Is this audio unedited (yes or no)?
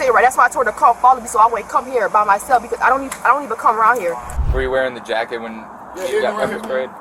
no